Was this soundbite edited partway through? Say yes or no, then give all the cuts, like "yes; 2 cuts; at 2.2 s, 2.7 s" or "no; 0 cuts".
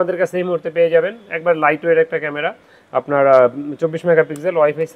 no; 0 cuts